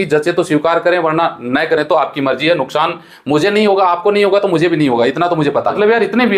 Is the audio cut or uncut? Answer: uncut